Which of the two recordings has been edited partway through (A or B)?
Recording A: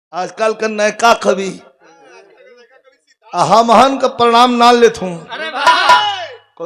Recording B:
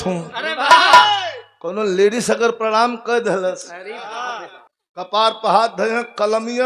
B